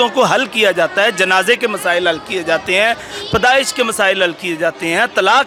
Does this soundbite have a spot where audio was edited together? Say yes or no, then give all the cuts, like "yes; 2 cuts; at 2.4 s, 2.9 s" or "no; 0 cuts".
no; 0 cuts